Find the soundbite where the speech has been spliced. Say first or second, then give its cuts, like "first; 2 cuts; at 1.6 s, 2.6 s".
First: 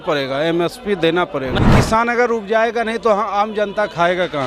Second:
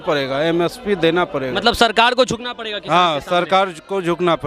first; 1 cut; at 1.6 s